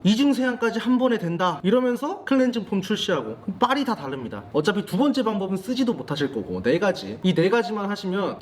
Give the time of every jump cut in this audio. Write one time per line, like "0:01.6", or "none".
0:04.5